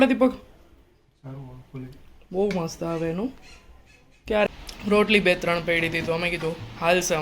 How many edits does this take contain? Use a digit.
1